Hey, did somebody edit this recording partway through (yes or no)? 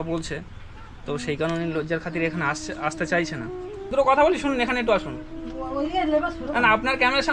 yes